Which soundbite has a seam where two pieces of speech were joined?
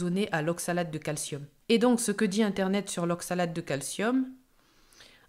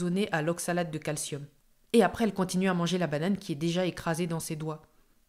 second; 1 cut; at 1.6 s

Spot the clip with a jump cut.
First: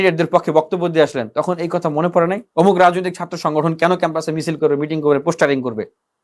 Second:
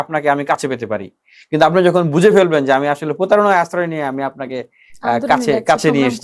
first; 1 cut; at 2.4 s

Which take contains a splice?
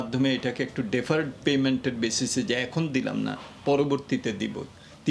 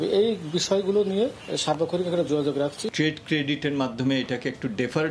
second; 2 cuts; at 1.5 s, 2.9 s

